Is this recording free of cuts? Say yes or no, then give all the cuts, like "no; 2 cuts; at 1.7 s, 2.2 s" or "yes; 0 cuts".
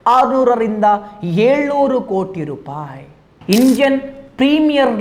no; 1 cut; at 3.4 s